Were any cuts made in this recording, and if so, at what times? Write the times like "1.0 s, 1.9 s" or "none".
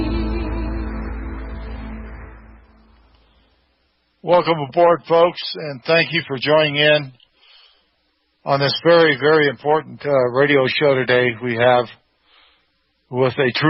9.2 s